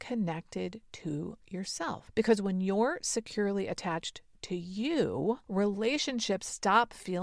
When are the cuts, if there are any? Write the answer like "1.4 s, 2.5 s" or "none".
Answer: 2.0 s, 5.4 s